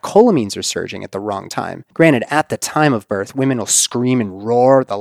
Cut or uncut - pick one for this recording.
cut